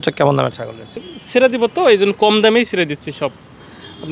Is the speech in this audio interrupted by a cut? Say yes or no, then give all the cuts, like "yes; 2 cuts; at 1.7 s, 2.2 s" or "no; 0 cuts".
yes; 1 cut; at 1.0 s